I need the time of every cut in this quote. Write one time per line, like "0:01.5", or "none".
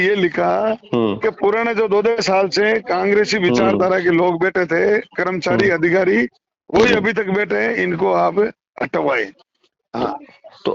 none